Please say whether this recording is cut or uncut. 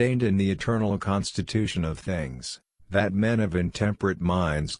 uncut